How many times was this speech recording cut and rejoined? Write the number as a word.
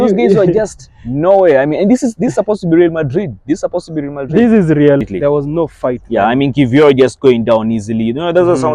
one